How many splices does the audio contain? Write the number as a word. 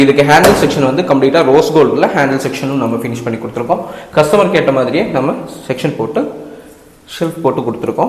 zero